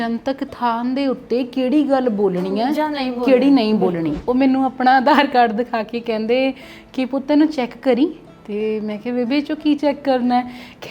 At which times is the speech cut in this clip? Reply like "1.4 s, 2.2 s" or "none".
4.2 s